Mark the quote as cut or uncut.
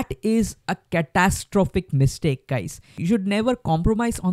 cut